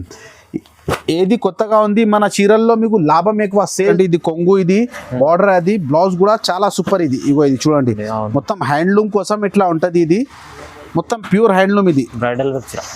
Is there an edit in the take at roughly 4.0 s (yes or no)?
yes